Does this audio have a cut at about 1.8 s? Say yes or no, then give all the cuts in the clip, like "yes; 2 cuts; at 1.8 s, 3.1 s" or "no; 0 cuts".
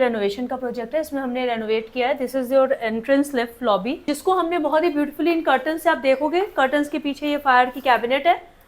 no; 1 cut; at 4.0 s